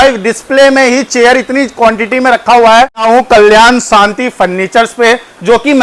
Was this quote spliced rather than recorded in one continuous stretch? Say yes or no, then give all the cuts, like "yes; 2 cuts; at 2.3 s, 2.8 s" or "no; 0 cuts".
no; 0 cuts